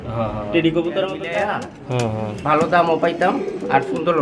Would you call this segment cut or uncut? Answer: cut